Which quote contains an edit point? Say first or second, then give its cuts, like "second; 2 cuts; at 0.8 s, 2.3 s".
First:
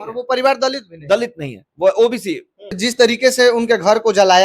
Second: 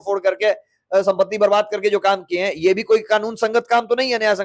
first; 1 cut; at 2.8 s